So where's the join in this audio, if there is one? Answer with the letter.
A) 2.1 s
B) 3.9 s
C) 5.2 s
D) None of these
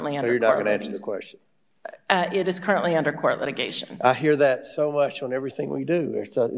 D